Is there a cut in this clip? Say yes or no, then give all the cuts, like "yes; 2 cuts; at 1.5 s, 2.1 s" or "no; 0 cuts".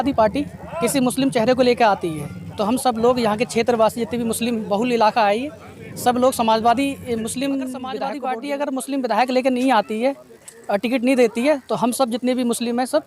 yes; 1 cut; at 8.1 s